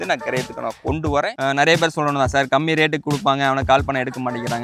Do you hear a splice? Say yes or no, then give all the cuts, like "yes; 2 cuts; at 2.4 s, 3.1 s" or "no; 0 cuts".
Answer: yes; 1 cut; at 1.3 s